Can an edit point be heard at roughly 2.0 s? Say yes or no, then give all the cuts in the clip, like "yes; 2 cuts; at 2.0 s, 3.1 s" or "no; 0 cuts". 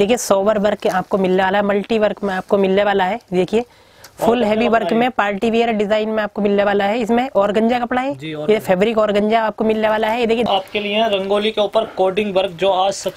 no; 1 cut; at 10.5 s